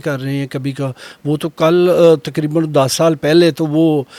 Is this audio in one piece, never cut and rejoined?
yes; 0 cuts

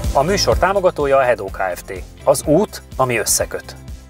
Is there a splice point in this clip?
no; 0 cuts

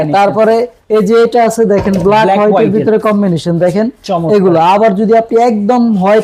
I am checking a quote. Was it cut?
no; 0 cuts

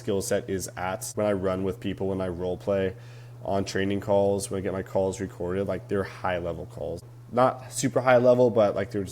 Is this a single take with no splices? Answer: no; 2 cuts; at 1.0 s, 7.0 s

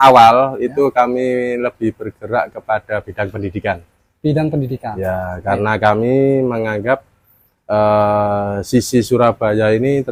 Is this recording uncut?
yes; 0 cuts

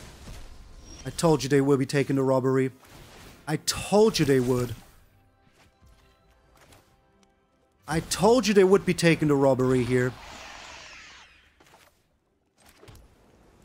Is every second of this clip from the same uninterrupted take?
yes; 0 cuts

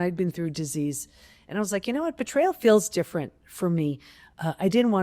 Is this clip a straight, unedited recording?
yes; 0 cuts

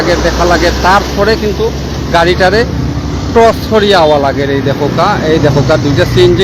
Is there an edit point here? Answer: no; 0 cuts

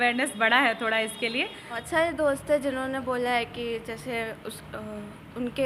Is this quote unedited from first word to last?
no; 1 cut; at 1.8 s

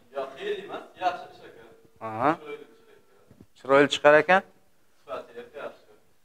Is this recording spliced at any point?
no; 0 cuts

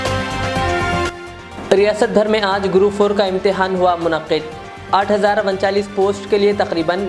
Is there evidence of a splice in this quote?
no; 0 cuts

